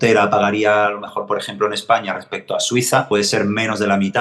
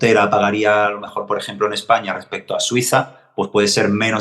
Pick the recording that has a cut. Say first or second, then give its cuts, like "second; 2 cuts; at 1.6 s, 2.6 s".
first; 1 cut; at 3.1 s